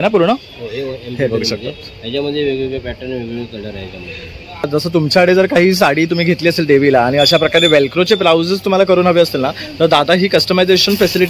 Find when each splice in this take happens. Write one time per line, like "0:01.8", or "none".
0:04.7